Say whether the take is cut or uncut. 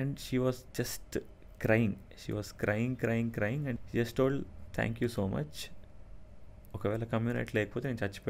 cut